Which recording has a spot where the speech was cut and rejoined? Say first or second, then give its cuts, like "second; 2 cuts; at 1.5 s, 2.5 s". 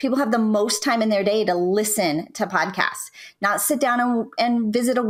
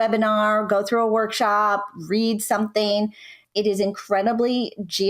second; 1 cut; at 3.3 s